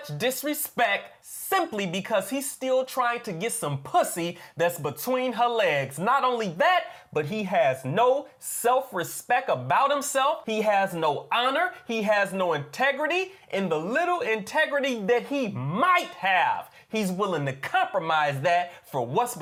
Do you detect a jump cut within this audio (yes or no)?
no